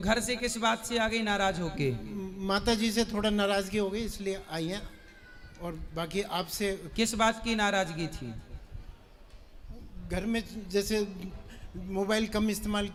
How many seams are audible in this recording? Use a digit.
0